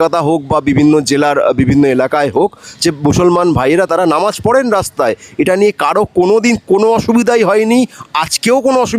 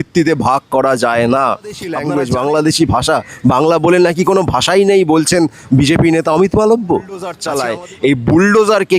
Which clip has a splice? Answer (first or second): second